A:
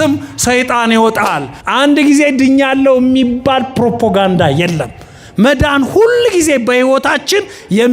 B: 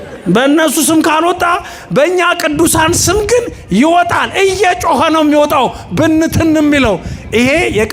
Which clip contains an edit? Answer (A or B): A